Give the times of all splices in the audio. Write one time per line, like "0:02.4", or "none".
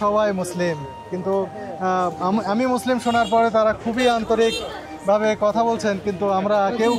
none